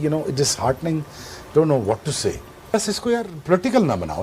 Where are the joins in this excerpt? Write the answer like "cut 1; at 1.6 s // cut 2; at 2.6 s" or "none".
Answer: cut 1; at 2.7 s